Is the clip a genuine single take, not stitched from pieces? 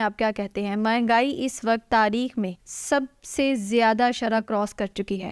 no; 1 cut; at 2.7 s

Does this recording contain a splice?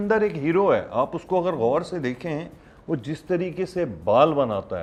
no; 0 cuts

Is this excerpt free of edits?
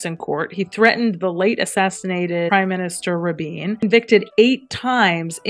no; 2 cuts; at 2.5 s, 3.8 s

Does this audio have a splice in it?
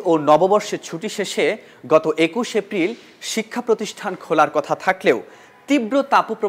no; 0 cuts

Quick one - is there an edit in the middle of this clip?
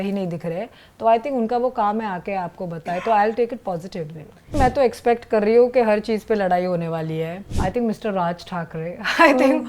yes; 2 cuts; at 4.6 s, 7.4 s

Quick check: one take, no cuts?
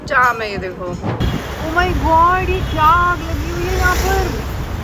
no; 1 cut; at 1.2 s

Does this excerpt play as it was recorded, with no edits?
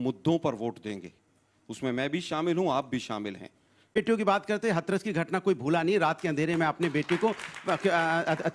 no; 1 cut; at 4.0 s

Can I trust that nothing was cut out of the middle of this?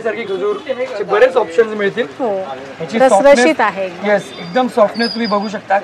yes; 0 cuts

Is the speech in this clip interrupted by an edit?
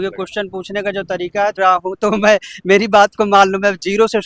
yes; 1 cut; at 1.6 s

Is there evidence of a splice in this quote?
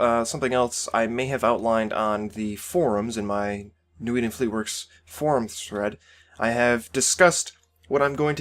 yes; 1 cut; at 7.3 s

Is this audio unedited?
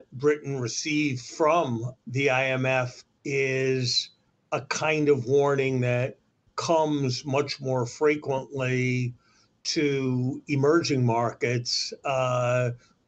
no; 2 cuts; at 1.9 s, 3.0 s

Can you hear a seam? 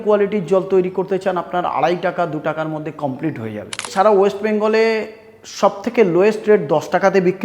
yes; 1 cut; at 3.8 s

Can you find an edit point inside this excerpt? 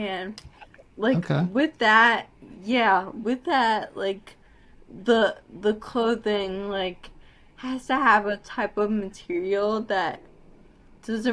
no; 0 cuts

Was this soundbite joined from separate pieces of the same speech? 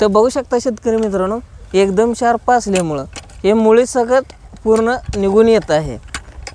no; 0 cuts

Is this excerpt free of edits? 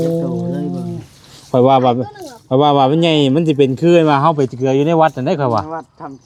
yes; 0 cuts

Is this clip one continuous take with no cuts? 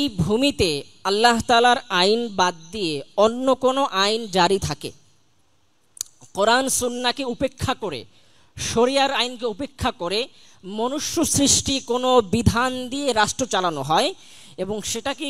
yes; 0 cuts

